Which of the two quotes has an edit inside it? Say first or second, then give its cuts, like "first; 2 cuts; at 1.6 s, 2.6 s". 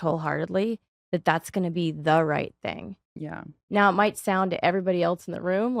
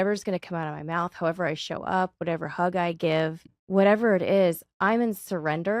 second; 1 cut; at 3.5 s